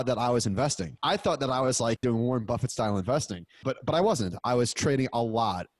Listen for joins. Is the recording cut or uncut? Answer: cut